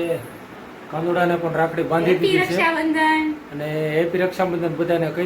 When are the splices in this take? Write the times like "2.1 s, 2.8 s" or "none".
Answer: none